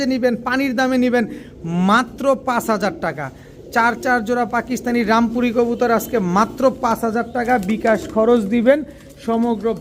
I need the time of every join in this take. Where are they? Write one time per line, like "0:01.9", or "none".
none